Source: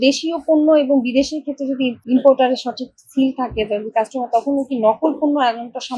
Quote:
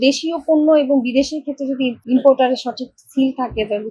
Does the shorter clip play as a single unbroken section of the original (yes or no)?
yes